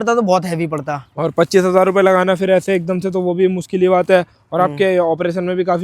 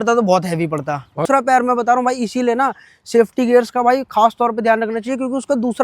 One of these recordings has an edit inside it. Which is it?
second; 1 cut; at 1.2 s

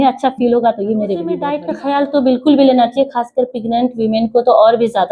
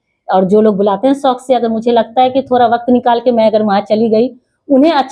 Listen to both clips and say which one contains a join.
first; 1 cut; at 1.7 s

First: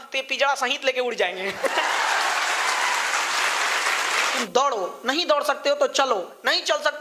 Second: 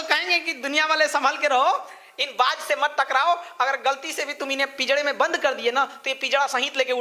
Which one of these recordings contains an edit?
first; 1 cut; at 4.4 s

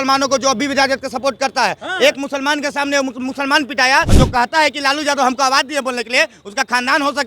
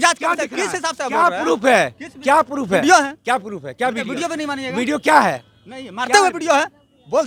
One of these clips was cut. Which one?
first; 1 cut; at 4.1 s

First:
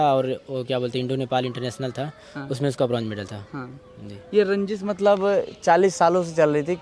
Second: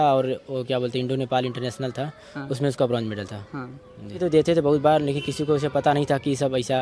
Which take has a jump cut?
second; 1 cut; at 4.2 s

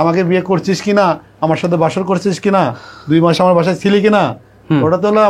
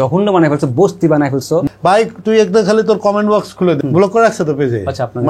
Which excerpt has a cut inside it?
second; 2 cuts; at 1.7 s, 3.8 s

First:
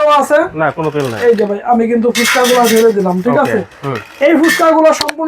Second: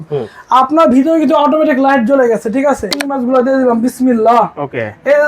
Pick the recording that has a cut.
second; 1 cut; at 3.0 s

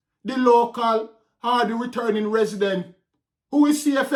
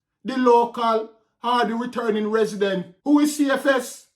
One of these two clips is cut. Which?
second; 1 cut; at 2.9 s

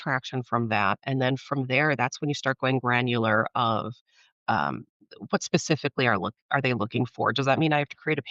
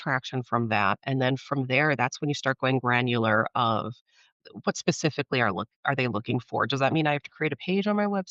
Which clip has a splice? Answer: second; 1 cut; at 4.2 s

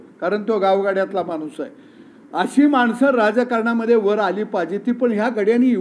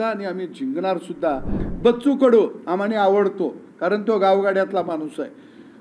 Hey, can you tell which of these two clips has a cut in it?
second; 1 cut; at 1.6 s

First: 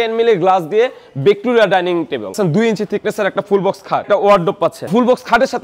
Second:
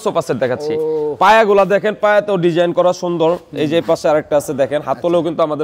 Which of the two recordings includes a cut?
first; 3 cuts; at 2.3 s, 4.0 s, 4.9 s

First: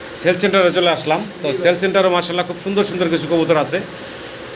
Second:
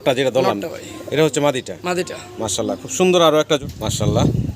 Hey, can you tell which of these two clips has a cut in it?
second; 1 cut; at 3.6 s

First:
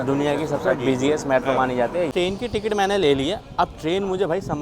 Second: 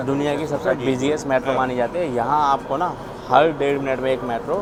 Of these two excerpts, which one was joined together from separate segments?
first; 1 cut; at 2.1 s

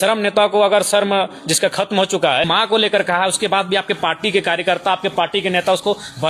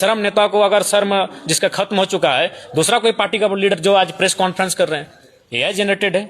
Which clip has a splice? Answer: first; 1 cut; at 2.5 s

